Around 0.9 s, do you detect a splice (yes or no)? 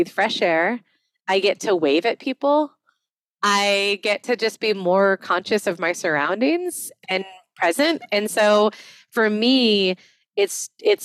no